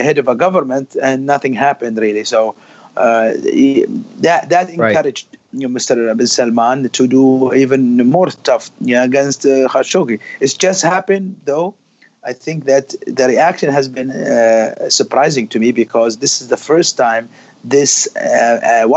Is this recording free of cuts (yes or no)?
yes